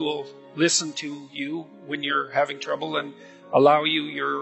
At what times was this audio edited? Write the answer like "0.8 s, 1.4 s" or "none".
none